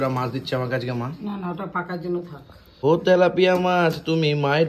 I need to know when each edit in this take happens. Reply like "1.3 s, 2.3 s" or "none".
2.8 s